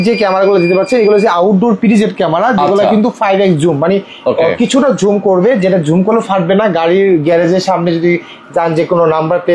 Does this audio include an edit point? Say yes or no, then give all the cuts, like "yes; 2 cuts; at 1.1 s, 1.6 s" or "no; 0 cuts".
no; 0 cuts